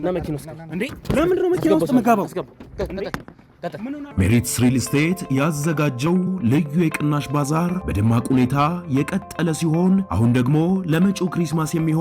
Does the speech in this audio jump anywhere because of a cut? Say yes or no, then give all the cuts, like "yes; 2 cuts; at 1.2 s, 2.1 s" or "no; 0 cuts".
yes; 1 cut; at 4.1 s